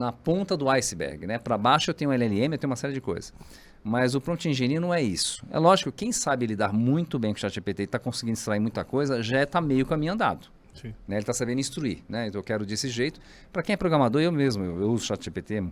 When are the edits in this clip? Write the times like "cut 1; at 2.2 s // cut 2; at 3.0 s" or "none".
none